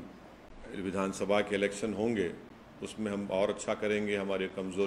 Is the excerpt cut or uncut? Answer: uncut